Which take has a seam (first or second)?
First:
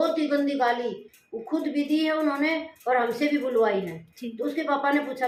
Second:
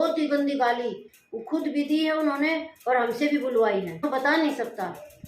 second